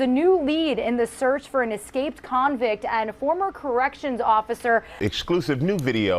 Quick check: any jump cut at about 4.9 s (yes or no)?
yes